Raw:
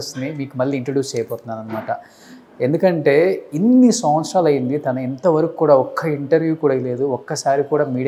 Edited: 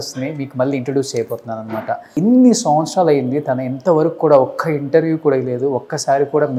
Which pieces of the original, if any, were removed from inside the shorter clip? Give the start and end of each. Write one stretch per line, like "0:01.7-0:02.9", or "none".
0:02.1-0:03.5